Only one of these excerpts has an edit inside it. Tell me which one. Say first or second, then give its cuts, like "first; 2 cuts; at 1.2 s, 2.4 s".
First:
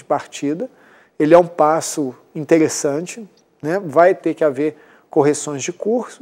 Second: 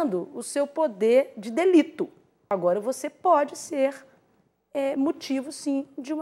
second; 1 cut; at 2.5 s